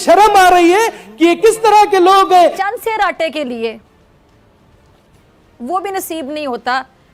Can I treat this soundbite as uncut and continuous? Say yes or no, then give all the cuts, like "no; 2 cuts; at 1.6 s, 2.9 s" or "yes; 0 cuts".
no; 1 cut; at 2.6 s